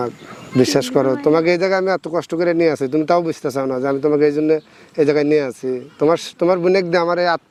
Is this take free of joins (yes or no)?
yes